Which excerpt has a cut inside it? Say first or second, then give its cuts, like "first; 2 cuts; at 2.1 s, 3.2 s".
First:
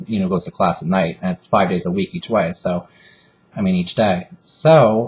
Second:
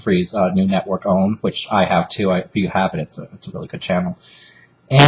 second; 1 cut; at 3.0 s